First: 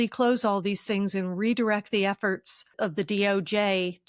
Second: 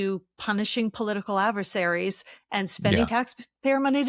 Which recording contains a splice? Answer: first; 1 cut; at 2.7 s

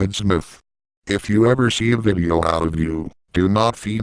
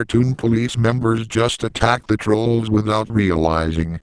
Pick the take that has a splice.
second; 1 cut; at 2.5 s

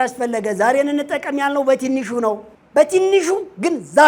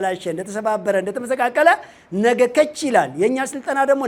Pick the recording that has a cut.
first; 1 cut; at 2.5 s

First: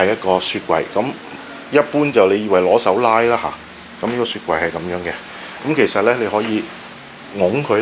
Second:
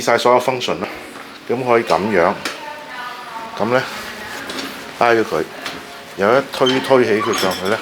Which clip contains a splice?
second; 1 cut; at 0.9 s

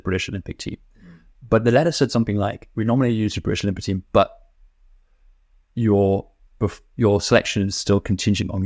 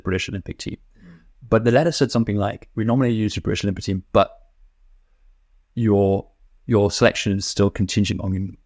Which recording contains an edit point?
second; 1 cut; at 6.5 s

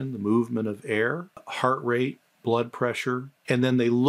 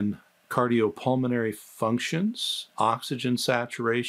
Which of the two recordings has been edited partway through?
first; 1 cut; at 1.3 s

